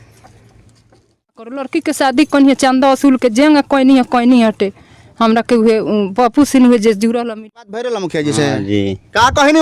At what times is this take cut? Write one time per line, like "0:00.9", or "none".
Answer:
0:01.7
0:07.3